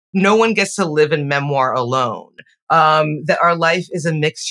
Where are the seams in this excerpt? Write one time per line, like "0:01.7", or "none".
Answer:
none